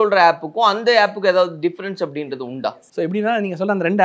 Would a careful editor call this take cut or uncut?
uncut